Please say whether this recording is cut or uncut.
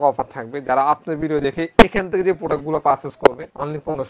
uncut